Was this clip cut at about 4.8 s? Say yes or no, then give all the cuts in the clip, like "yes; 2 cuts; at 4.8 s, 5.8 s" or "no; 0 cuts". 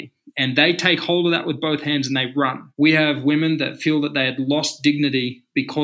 no; 1 cut; at 2.6 s